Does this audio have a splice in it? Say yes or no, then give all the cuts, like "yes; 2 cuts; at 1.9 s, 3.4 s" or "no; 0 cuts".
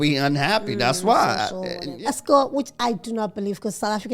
yes; 1 cut; at 1.8 s